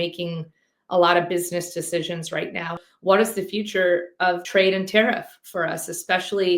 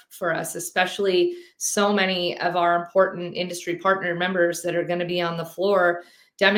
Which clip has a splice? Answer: first; 2 cuts; at 2.8 s, 4.4 s

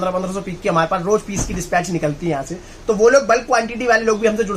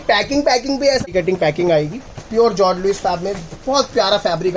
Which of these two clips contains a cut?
second; 1 cut; at 1.1 s

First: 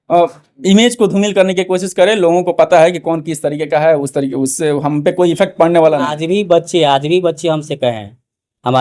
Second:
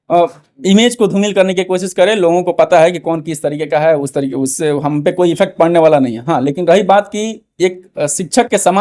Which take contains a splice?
first; 1 cut; at 6.1 s

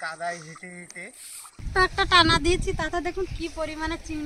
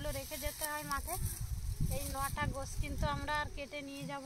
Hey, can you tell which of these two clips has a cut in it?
first; 1 cut; at 1.5 s

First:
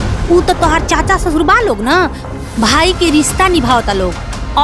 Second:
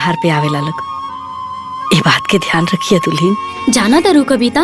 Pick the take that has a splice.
second; 1 cut; at 3.5 s

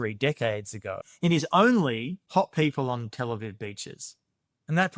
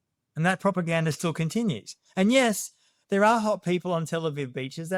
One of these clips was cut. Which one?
first; 2 cuts; at 1.1 s, 2.2 s

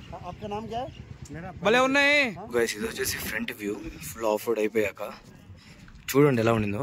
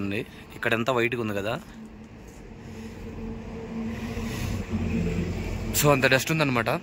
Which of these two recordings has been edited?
first; 1 cut; at 2.4 s

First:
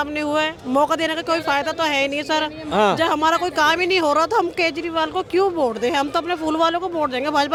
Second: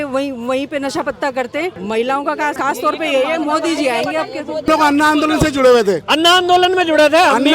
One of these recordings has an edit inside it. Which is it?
second; 3 cuts; at 1.8 s, 2.6 s, 4.7 s

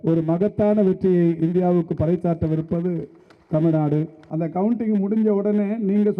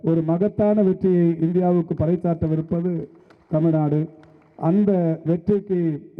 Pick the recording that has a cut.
first; 1 cut; at 4.2 s

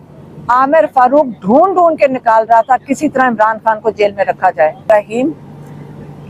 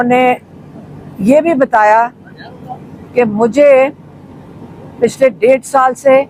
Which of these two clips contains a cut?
first; 1 cut; at 4.8 s

